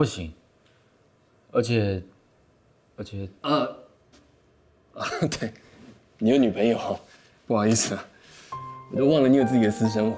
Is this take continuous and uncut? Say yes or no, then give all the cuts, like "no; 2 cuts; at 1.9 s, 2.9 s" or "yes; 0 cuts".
yes; 0 cuts